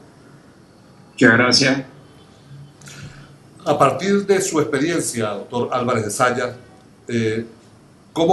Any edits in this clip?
yes; 1 cut; at 4.7 s

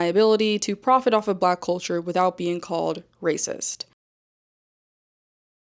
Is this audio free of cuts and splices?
yes; 0 cuts

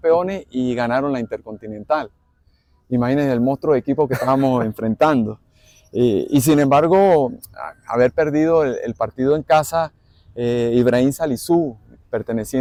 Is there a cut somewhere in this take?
no; 0 cuts

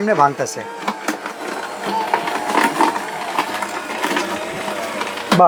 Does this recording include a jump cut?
no; 0 cuts

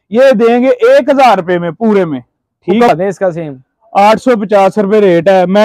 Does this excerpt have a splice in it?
yes; 1 cut; at 2.9 s

